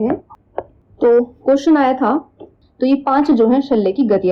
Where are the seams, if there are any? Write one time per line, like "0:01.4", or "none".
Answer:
0:02.6

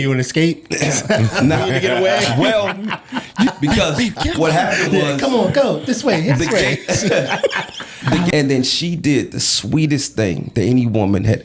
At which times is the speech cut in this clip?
0:03.5
0:08.3

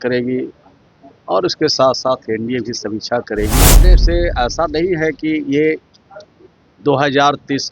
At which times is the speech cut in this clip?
0:03.9

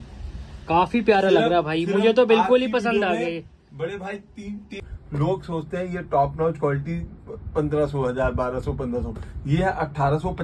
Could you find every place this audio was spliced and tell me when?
0:04.8

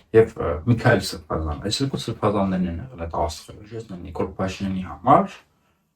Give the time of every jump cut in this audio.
0:04.0

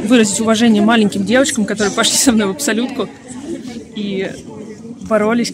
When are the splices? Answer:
none

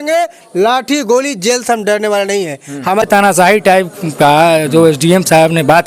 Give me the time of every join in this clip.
0:03.0

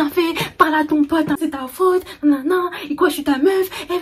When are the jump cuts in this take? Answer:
0:01.5

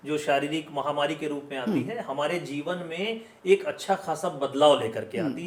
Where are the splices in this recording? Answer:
none

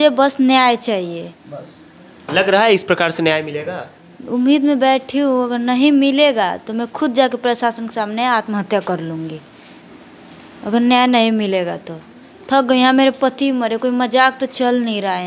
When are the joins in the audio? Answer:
none

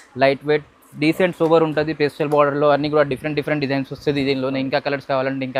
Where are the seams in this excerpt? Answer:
none

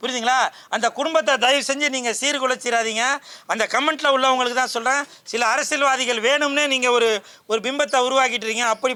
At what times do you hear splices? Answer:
none

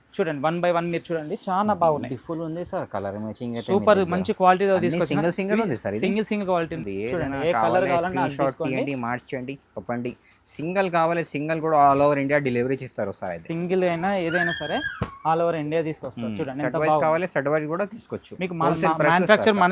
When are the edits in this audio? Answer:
0:06.8

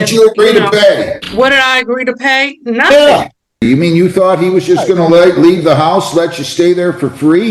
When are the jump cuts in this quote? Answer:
0:01.2
0:03.7

